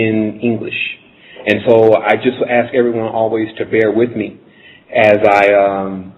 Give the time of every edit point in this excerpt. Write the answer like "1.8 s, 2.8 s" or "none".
none